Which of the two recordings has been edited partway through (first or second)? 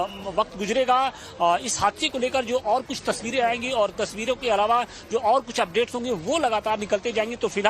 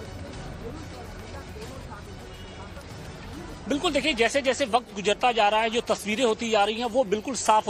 first